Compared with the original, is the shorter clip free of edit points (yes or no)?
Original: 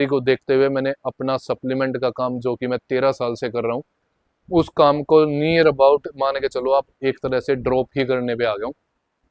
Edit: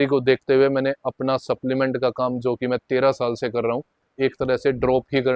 no